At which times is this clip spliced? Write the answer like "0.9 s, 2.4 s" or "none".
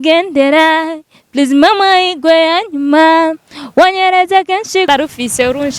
4.9 s